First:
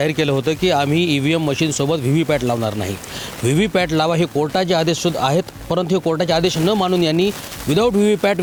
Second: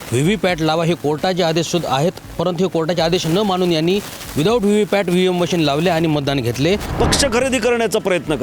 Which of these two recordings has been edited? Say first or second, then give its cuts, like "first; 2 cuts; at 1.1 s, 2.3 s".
second; 1 cut; at 6.9 s